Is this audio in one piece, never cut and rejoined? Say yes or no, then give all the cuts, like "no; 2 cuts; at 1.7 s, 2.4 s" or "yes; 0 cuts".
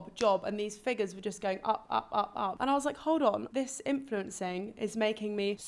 yes; 0 cuts